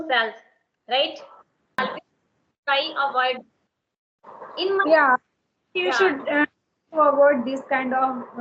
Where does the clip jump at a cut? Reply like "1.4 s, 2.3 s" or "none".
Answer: 1.8 s